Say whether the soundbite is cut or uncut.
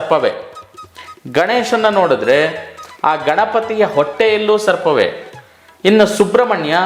uncut